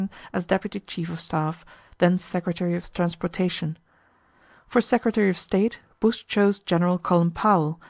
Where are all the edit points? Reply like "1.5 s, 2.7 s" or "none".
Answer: 1.2 s